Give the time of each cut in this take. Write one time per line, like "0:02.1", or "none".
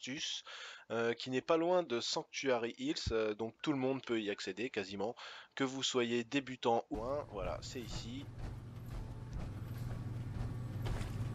none